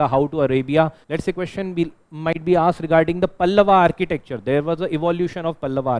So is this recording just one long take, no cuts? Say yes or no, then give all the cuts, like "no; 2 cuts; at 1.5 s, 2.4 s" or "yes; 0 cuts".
no; 1 cut; at 1.0 s